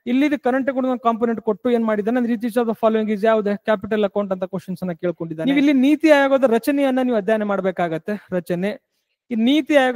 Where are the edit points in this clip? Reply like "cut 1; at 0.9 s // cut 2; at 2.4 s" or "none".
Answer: cut 1; at 5.3 s